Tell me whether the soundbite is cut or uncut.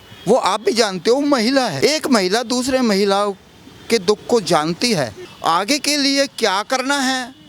cut